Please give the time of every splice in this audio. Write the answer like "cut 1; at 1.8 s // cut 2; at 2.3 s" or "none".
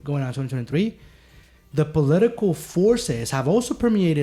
none